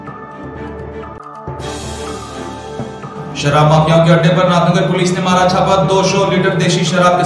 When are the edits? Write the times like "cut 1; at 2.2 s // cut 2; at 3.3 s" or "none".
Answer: cut 1; at 1.0 s